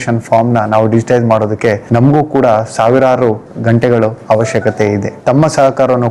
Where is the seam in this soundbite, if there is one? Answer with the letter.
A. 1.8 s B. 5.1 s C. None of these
B